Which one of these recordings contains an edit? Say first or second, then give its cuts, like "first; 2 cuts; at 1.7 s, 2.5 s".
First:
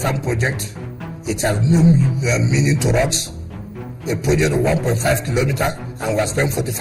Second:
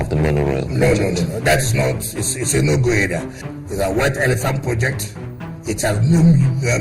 second; 1 cut; at 3.4 s